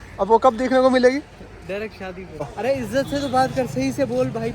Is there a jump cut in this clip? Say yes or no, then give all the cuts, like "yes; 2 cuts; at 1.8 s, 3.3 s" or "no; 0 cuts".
yes; 1 cut; at 2.6 s